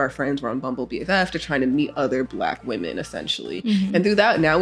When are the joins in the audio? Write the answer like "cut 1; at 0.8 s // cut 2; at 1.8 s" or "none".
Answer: none